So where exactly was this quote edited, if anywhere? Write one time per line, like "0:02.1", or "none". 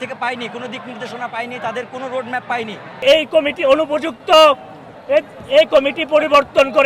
0:03.0